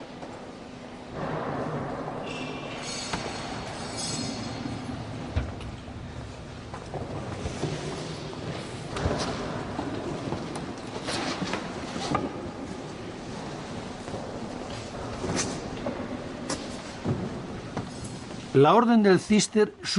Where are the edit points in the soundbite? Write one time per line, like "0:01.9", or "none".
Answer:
none